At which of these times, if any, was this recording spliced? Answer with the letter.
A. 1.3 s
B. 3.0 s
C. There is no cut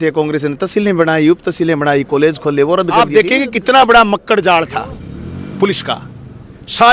B